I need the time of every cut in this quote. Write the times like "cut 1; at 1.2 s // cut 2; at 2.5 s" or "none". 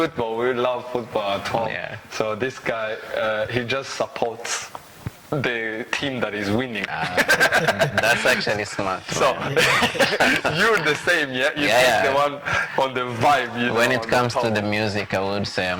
none